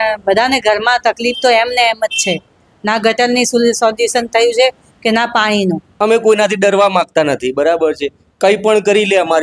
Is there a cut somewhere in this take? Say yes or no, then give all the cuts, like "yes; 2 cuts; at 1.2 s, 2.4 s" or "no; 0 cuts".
yes; 1 cut; at 5.9 s